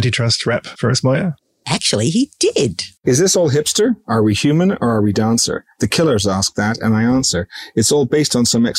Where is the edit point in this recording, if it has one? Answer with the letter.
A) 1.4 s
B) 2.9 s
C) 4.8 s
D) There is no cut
B